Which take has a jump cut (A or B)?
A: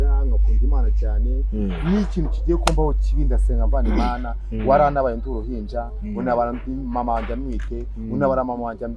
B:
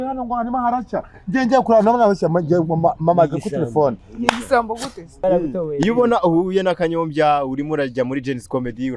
B